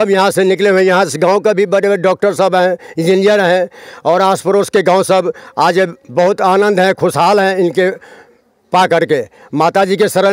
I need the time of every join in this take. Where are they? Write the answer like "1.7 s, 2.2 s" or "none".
none